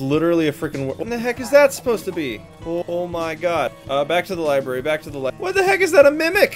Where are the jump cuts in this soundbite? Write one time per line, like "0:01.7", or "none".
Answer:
0:01.0
0:02.8
0:03.7

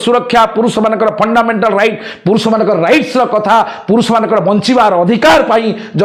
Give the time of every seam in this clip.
none

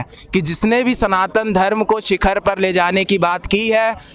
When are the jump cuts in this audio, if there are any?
none

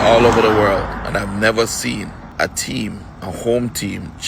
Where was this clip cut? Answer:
0:02.2

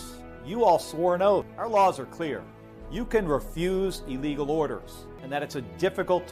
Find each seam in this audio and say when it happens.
0:01.5
0:05.2

